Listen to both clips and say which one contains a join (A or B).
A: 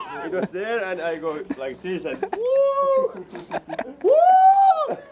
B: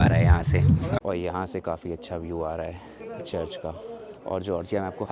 B